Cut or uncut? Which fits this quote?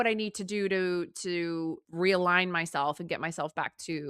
cut